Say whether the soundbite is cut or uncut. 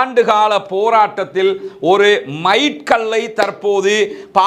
uncut